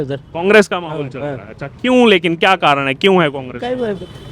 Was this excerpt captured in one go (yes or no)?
yes